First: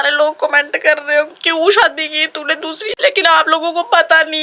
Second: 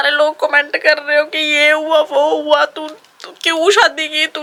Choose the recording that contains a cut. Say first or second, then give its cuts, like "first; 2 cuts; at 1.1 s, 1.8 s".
first; 2 cuts; at 1.4 s, 2.8 s